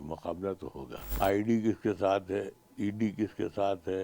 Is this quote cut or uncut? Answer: cut